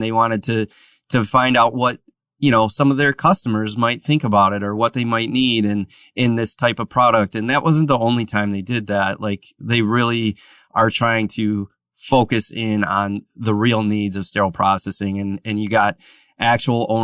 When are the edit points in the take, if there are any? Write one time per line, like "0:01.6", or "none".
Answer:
none